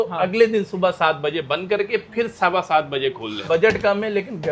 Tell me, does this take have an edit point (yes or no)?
yes